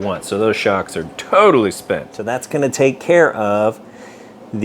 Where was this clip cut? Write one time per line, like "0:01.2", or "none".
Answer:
0:02.1